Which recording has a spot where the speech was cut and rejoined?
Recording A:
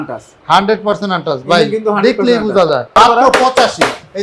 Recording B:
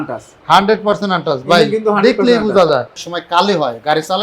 B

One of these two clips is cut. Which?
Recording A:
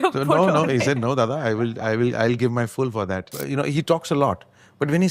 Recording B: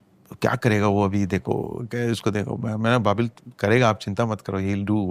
A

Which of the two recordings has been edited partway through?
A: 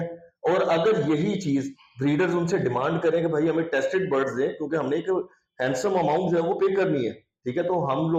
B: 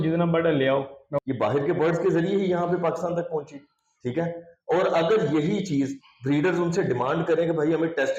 B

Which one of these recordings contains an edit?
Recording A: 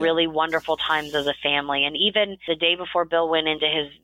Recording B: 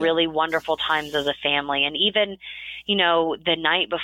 A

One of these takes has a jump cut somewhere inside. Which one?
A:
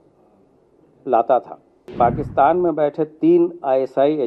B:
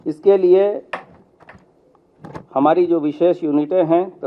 A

